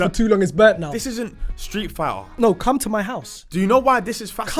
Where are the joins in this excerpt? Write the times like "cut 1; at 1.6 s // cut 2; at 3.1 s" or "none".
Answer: cut 1; at 1.0 s // cut 2; at 2.4 s